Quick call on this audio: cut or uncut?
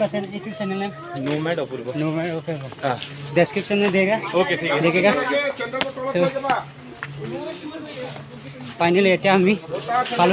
uncut